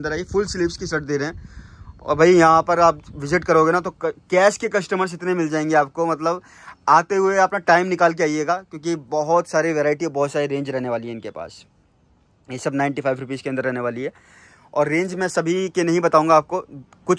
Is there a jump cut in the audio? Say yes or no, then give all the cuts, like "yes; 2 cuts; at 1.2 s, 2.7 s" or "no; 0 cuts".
no; 0 cuts